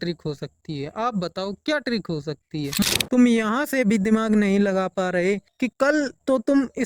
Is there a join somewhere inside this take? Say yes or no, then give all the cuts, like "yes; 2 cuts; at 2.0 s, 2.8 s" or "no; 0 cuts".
yes; 1 cut; at 2.8 s